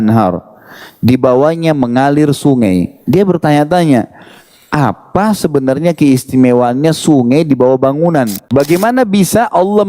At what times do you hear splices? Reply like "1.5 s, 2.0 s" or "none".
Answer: 8.4 s